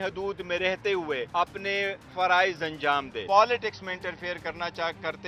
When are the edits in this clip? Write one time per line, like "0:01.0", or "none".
0:01.3
0:03.1

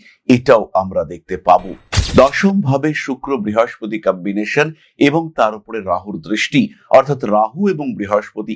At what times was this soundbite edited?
0:01.9

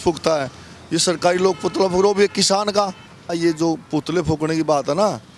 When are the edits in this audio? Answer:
0:03.3

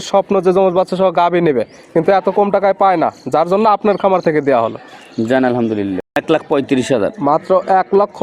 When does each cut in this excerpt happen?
0:06.2

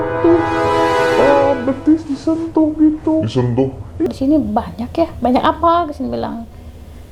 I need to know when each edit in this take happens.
0:04.1

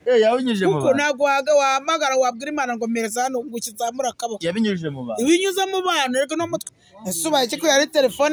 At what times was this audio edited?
0:06.6

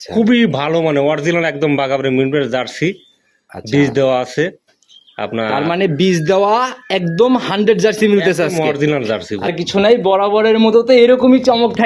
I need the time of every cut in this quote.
0:09.5

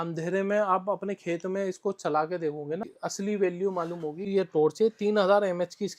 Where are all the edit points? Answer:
0:03.0
0:04.3

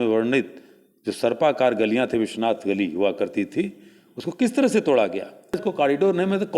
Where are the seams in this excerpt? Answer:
0:05.6

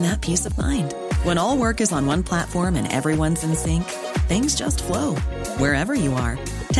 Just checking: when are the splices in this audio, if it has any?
none

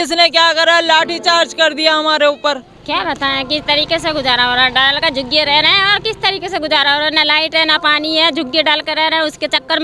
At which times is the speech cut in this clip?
0:02.7

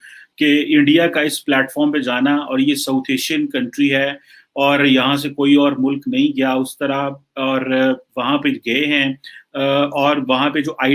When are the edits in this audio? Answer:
none

